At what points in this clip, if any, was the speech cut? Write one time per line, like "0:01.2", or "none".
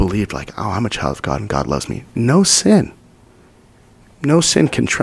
0:02.0